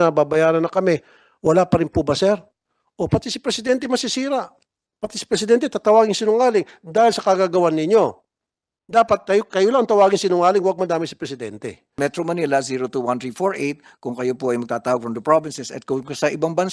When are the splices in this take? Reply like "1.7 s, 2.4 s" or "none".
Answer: 12.0 s